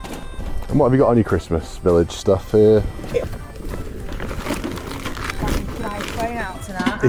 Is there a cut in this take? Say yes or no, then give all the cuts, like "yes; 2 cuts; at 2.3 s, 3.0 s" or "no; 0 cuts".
yes; 1 cut; at 3.2 s